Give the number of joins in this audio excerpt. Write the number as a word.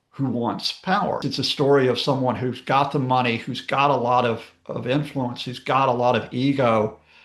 one